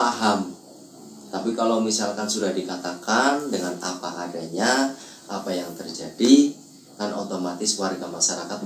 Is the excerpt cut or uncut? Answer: uncut